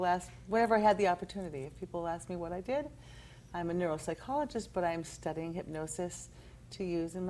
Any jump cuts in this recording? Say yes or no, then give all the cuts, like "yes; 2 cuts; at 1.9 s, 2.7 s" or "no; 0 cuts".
no; 0 cuts